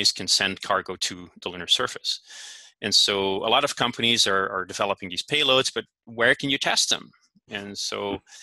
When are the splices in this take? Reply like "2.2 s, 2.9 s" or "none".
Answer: none